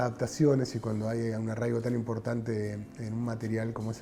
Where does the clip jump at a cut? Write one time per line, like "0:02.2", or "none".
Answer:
none

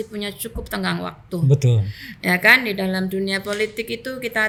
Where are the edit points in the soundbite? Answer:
none

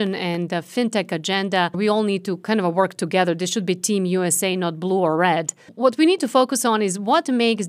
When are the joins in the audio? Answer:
0:01.8
0:05.7

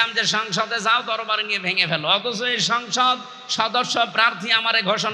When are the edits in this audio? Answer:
none

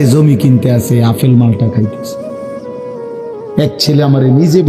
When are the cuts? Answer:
0:02.0
0:03.5

